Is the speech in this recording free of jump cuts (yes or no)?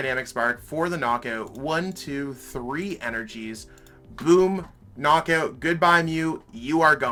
yes